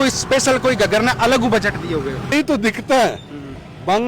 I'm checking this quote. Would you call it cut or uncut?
cut